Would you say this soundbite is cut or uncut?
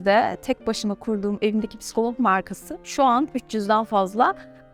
uncut